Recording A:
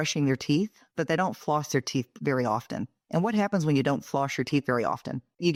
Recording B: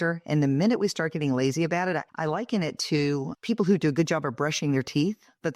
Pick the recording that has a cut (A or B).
B